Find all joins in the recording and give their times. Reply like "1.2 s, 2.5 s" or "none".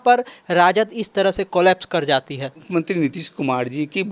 2.6 s